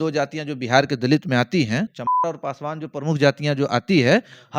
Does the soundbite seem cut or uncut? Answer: cut